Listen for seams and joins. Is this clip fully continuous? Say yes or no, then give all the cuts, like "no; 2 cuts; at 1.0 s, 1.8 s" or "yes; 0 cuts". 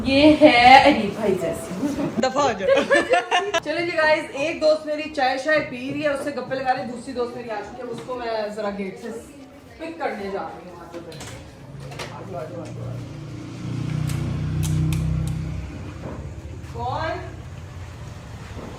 yes; 0 cuts